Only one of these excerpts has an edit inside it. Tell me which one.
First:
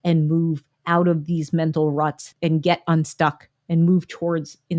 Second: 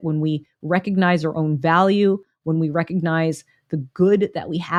first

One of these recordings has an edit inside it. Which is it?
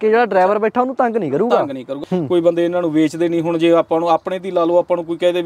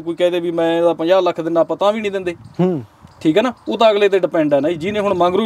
first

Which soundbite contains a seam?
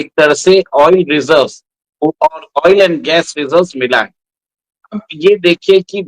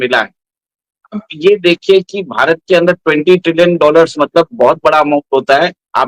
first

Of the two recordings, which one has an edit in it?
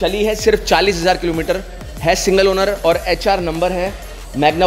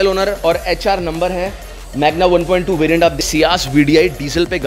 second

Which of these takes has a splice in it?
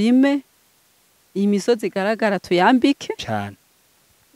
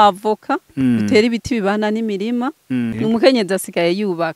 second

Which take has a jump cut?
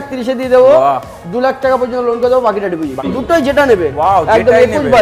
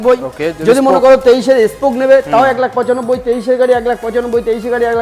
first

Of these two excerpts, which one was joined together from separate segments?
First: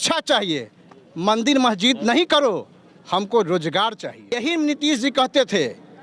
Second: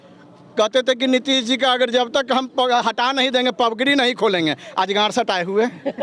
first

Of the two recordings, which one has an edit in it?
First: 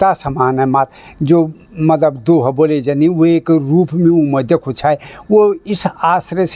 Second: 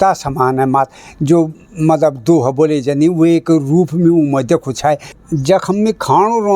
second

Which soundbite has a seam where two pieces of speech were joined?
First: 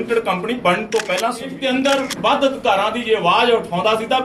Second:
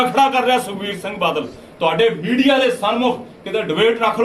first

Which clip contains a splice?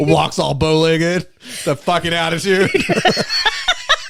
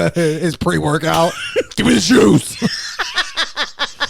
second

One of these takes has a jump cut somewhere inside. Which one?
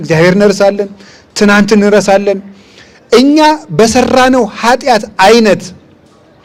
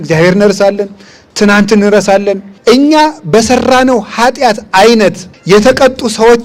second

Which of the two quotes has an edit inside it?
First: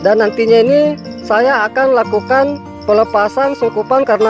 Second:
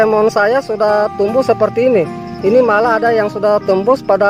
first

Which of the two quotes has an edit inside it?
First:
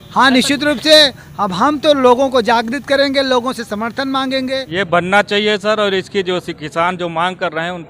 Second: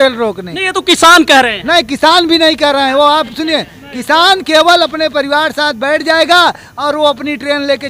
first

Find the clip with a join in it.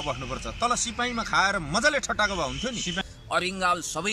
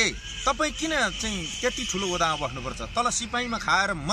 first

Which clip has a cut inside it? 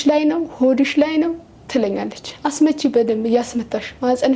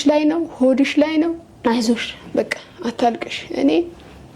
second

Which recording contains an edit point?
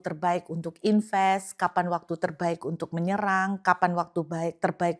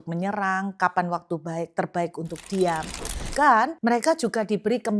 second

